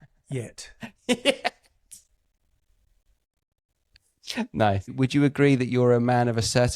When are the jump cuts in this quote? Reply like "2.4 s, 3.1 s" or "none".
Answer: 4.9 s